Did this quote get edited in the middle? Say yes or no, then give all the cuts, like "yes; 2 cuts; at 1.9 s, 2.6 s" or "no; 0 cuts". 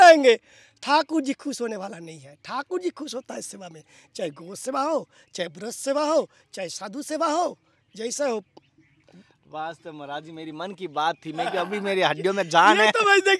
no; 0 cuts